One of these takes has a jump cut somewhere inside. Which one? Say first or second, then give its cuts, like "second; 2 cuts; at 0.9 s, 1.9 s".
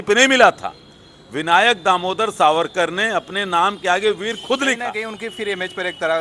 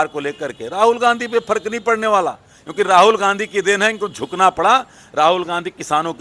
first; 1 cut; at 4.9 s